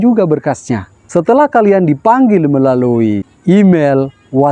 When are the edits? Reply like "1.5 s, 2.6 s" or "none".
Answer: 0.9 s, 3.3 s